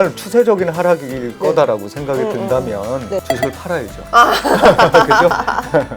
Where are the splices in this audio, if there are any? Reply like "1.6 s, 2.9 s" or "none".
3.2 s

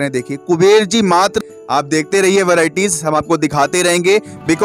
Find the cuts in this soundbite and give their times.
1.3 s

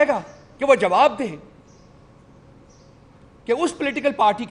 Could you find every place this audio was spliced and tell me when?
none

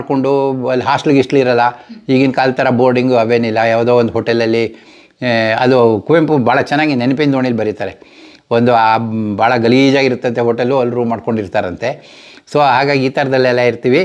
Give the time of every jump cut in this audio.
none

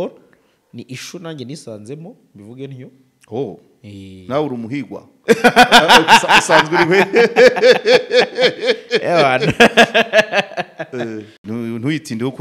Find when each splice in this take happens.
11.3 s

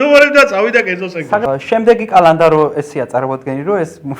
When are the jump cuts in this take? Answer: 1.4 s

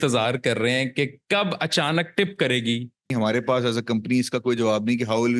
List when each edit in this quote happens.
3.1 s

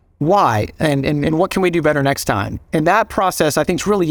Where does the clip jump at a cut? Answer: none

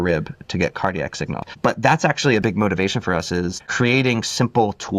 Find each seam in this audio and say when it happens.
1.5 s, 2.4 s, 3.6 s

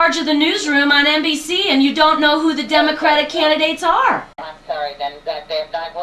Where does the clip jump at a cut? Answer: 4.5 s

